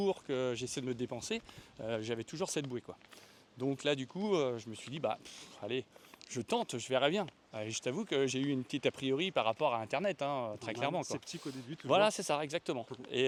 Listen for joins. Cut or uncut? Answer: uncut